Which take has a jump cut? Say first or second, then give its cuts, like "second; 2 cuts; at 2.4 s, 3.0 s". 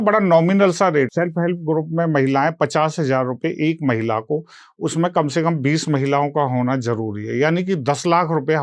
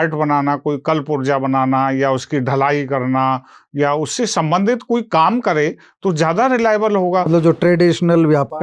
first; 1 cut; at 1.1 s